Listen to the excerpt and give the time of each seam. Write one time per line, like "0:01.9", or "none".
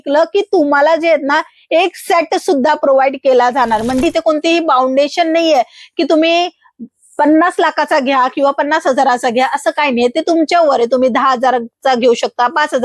0:04.0